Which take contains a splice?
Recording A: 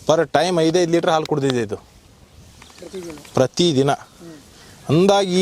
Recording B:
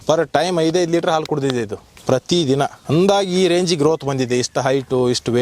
B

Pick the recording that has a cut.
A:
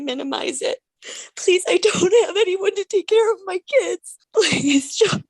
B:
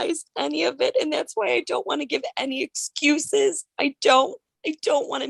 A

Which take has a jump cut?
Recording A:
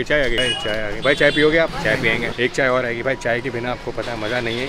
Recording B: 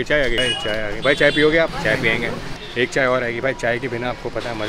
A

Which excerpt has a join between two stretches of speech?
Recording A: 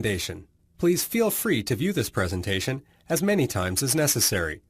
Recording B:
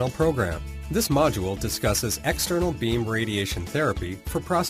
A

